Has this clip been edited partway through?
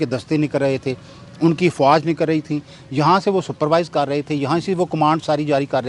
no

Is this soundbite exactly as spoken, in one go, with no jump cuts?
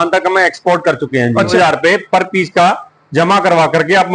no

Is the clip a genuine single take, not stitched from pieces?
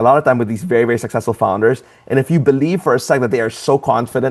yes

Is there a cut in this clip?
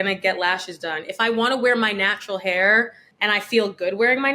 yes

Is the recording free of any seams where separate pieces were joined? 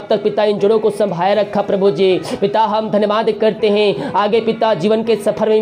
yes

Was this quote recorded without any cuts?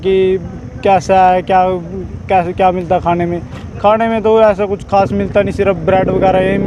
yes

